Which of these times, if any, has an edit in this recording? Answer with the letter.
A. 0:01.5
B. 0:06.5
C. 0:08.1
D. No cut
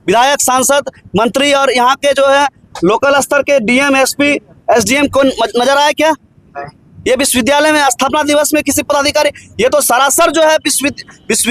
D